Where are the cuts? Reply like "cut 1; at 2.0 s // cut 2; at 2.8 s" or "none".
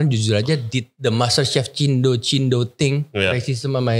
none